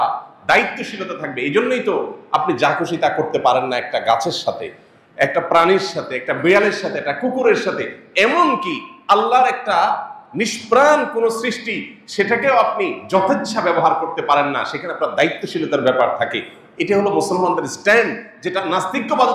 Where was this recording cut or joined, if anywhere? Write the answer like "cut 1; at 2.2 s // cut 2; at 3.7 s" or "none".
none